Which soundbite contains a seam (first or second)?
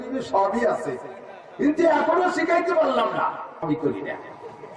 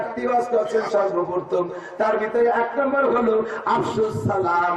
first